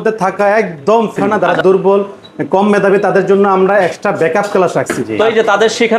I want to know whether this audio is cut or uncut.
cut